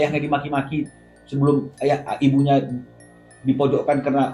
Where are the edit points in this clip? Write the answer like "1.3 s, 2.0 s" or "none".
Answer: none